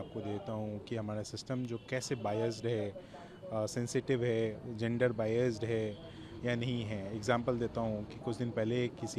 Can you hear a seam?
no; 0 cuts

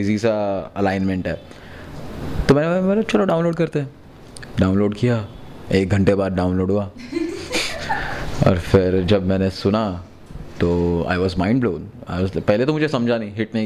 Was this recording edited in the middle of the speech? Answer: no; 0 cuts

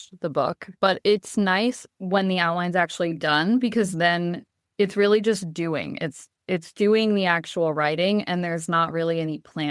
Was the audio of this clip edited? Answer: no; 0 cuts

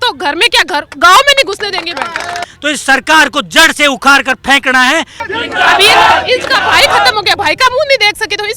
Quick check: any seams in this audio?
yes; 2 cuts; at 2.4 s, 5.3 s

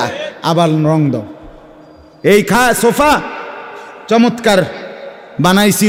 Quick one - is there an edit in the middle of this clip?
no; 0 cuts

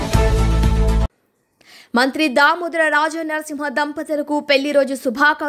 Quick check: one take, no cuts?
no; 1 cut; at 1.1 s

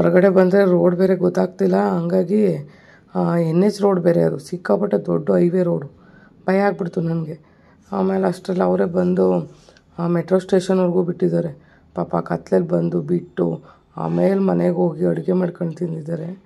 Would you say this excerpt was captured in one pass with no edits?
yes; 0 cuts

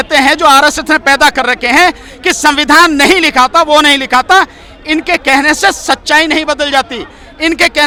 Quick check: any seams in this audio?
no; 0 cuts

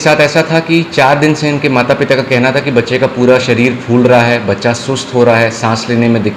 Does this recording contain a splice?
no; 0 cuts

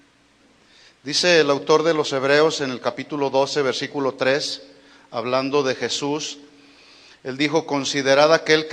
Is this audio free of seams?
yes; 0 cuts

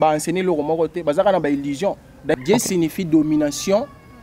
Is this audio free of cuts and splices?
no; 1 cut; at 2.3 s

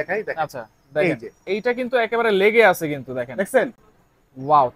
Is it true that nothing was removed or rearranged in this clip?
yes; 0 cuts

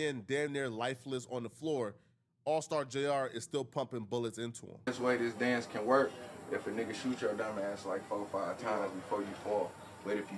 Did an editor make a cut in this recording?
yes; 1 cut; at 4.9 s

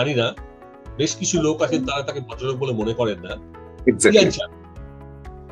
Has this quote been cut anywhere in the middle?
no; 0 cuts

